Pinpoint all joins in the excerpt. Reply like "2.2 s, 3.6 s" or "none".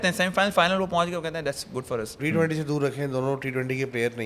2.1 s